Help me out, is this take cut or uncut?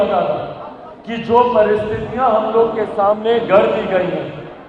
uncut